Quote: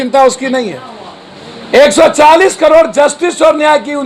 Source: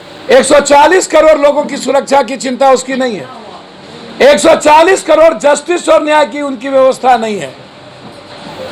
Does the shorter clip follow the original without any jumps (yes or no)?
yes